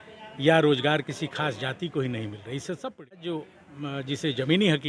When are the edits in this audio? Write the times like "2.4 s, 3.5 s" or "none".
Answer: 3.3 s